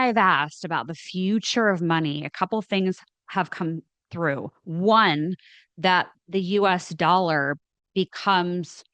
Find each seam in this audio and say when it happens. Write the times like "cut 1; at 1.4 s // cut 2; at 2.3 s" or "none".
none